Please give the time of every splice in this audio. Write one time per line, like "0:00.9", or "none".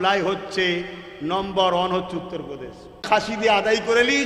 0:03.0